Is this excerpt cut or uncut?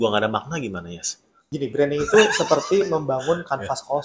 cut